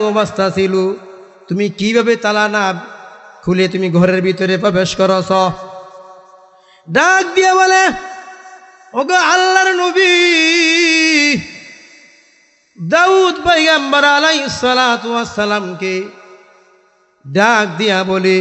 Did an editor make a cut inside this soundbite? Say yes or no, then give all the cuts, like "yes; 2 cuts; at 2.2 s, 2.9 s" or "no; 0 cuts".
no; 0 cuts